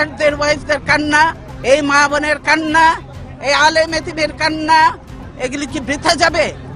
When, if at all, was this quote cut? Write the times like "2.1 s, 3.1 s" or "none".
1.5 s, 5.2 s

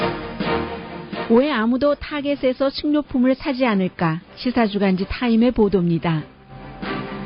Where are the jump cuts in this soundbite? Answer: 0.9 s

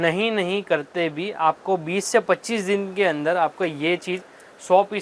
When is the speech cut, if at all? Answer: none

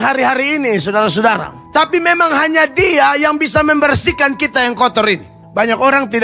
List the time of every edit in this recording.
1.5 s, 5.4 s

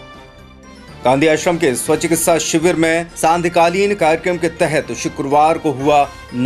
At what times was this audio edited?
1.0 s

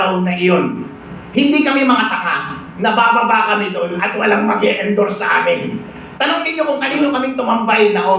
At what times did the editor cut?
none

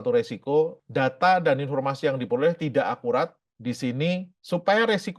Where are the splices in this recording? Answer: none

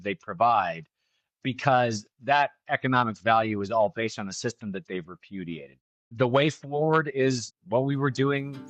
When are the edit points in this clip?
5.9 s, 7.5 s

